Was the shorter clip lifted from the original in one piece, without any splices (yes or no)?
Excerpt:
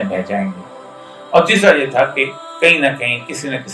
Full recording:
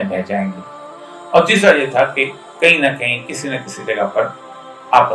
yes